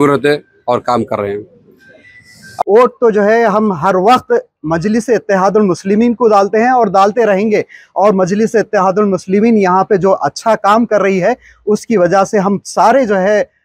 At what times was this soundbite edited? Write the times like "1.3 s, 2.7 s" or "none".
2.5 s